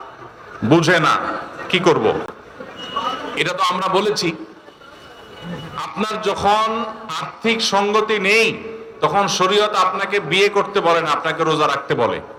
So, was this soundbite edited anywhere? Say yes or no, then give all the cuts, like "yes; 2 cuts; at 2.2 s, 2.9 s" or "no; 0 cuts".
no; 0 cuts